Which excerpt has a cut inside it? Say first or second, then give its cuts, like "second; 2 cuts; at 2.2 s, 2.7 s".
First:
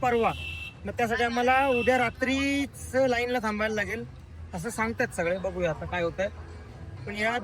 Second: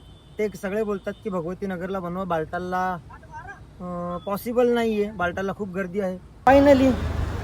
second; 1 cut; at 6.5 s